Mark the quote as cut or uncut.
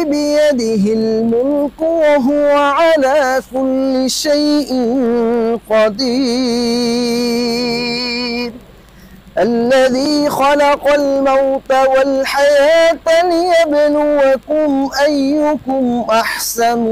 uncut